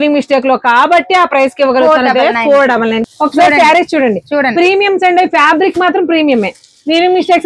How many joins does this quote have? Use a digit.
1